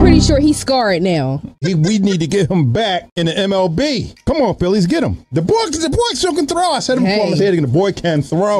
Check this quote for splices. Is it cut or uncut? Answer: cut